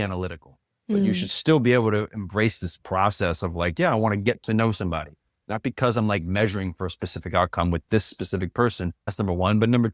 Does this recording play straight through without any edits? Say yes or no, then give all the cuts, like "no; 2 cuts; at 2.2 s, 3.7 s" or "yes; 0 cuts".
yes; 0 cuts